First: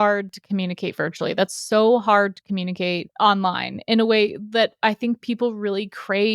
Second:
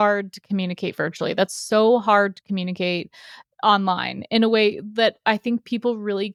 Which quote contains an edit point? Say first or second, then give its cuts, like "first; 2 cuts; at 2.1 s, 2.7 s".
first; 1 cut; at 3.1 s